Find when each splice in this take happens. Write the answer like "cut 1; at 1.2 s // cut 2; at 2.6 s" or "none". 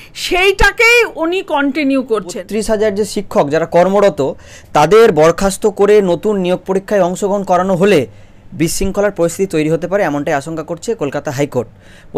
cut 1; at 2.4 s